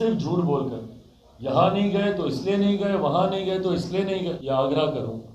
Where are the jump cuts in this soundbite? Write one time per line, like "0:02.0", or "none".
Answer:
0:04.4